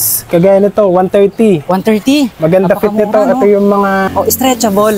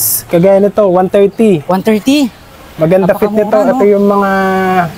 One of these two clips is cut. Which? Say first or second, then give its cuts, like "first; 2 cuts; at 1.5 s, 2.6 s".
first; 2 cuts; at 2.3 s, 4.1 s